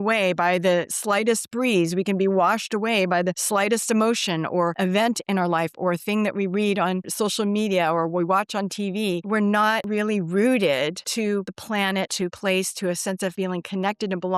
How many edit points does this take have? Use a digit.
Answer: 2